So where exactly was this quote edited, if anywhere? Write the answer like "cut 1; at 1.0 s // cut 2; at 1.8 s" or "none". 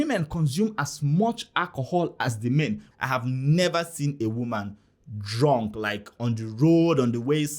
cut 1; at 2.8 s